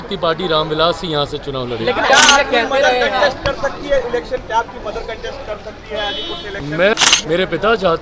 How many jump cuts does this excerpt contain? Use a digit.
2